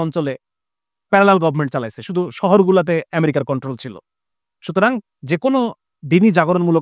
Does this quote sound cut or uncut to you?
uncut